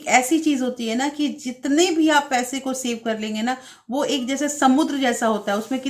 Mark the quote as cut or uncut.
uncut